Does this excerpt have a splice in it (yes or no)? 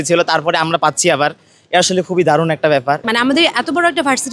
yes